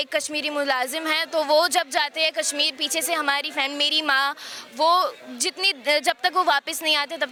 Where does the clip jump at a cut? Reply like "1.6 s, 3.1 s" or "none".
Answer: none

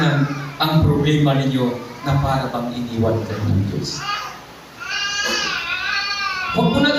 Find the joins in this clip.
none

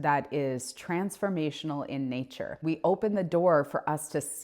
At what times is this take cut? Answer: 2.6 s

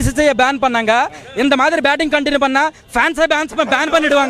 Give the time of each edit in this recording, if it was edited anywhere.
none

